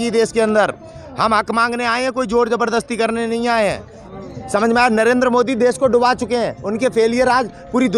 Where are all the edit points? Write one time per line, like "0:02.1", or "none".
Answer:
0:04.1

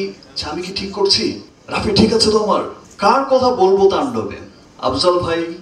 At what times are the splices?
none

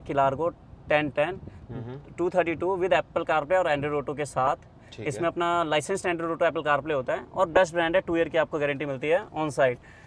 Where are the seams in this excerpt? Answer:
none

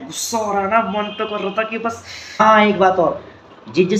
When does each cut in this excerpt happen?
0:02.4

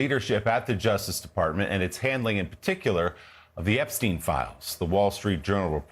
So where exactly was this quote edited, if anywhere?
0:00.9

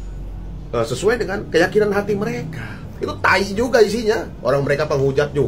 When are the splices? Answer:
0:02.9

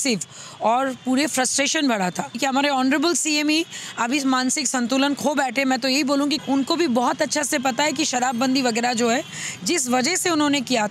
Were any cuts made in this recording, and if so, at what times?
0:02.4
0:06.4

